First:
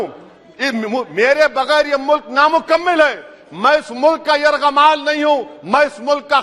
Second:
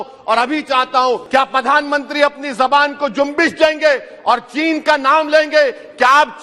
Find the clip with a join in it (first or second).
second